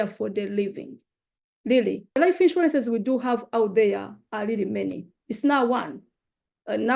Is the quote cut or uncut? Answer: cut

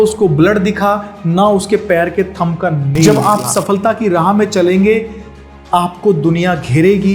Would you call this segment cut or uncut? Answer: cut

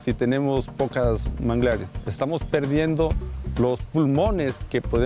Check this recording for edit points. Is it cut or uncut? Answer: cut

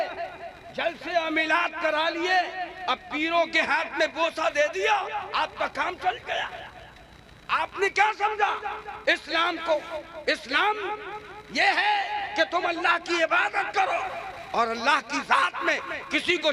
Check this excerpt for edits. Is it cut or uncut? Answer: uncut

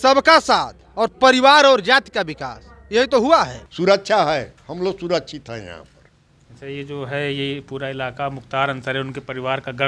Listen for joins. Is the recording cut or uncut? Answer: uncut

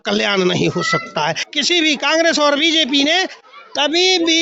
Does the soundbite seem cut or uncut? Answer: cut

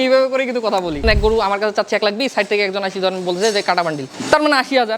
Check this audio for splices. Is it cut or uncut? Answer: cut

